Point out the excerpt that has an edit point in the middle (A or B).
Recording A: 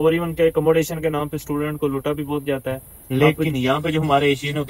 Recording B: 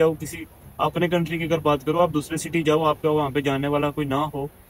A